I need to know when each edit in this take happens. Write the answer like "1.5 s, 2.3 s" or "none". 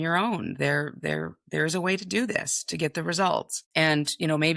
3.6 s